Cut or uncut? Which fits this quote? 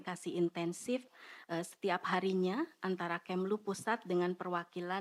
uncut